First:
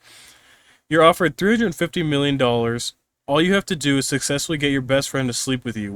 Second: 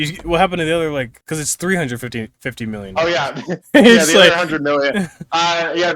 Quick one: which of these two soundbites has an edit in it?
second; 1 cut; at 1.2 s

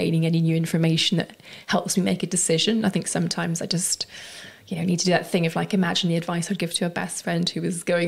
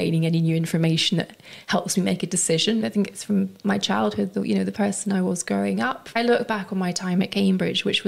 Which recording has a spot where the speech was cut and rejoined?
second; 2 cuts; at 2.8 s, 6.1 s

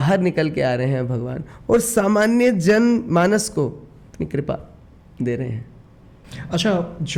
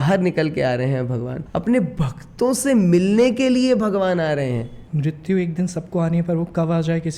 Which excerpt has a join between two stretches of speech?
second; 2 cuts; at 1.4 s, 4.8 s

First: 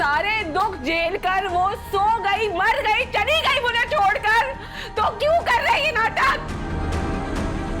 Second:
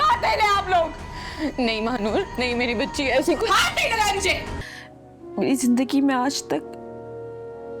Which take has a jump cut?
second; 1 cut; at 4.6 s

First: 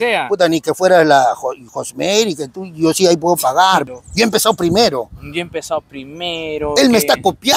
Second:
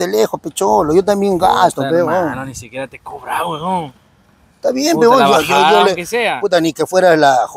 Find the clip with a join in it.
first; 1 cut; at 3.9 s

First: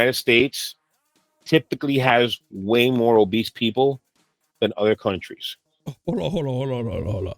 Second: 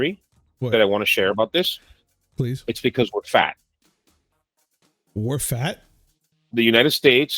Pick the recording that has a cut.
second; 1 cut; at 4.3 s

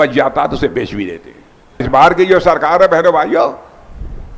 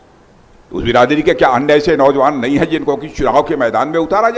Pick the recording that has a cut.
first; 1 cut; at 1.8 s

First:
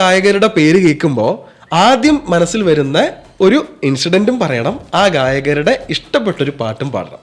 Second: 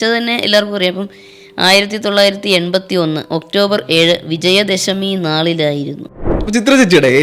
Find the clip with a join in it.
second; 1 cut; at 6.3 s

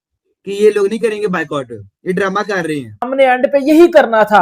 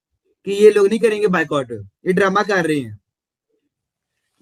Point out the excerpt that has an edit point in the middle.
first; 1 cut; at 3.0 s

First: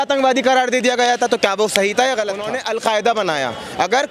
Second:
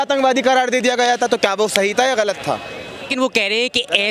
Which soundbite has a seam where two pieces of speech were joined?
first; 1 cut; at 2.5 s

